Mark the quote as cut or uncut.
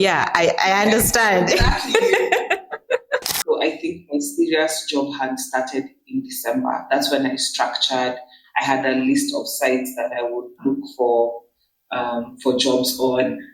cut